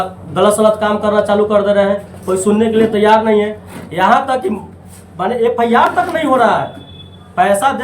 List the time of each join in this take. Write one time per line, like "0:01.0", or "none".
none